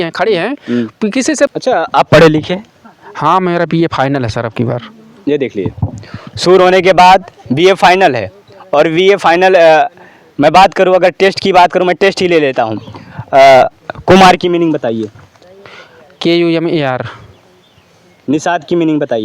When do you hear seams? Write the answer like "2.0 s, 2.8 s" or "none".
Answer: 1.5 s